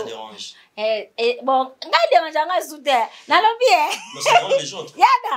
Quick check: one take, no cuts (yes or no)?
yes